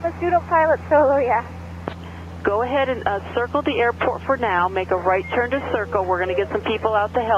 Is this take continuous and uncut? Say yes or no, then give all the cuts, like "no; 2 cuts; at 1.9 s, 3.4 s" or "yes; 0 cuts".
no; 1 cut; at 1.9 s